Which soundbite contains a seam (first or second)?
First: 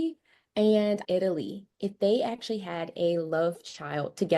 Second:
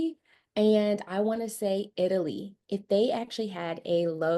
first